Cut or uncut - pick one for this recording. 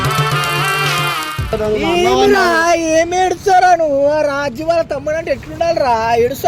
cut